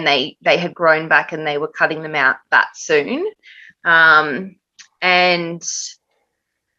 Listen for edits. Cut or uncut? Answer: uncut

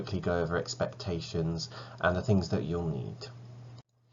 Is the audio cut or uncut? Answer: uncut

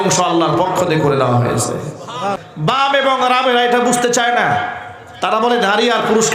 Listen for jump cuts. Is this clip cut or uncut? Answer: cut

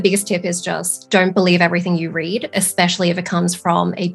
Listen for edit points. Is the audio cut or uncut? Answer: uncut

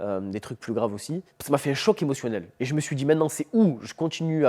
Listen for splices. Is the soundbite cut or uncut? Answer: cut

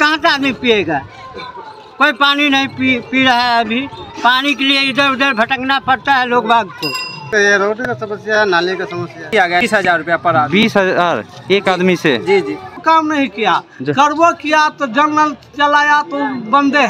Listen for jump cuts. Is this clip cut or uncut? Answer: cut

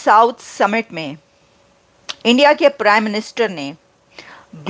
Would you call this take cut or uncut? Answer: uncut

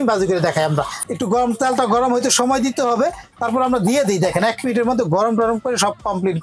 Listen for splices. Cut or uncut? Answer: cut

